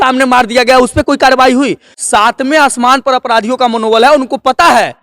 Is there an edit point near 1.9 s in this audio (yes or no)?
yes